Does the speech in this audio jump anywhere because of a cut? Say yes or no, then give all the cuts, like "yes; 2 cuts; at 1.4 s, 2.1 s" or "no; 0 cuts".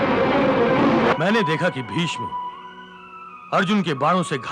yes; 1 cut; at 1.1 s